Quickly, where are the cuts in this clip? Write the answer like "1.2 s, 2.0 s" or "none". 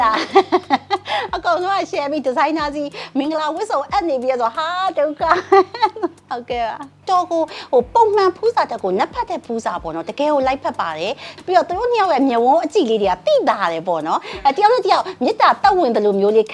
6.9 s, 11.3 s